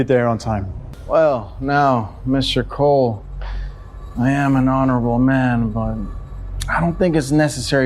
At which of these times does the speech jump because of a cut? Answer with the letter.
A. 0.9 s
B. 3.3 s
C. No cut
A